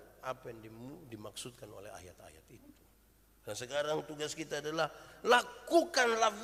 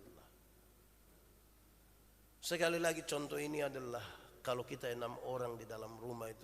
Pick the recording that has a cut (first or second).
second